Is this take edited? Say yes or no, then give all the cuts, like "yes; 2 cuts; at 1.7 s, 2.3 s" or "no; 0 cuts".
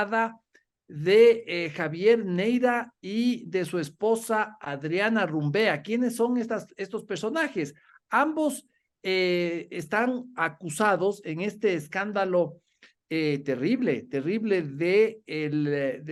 no; 0 cuts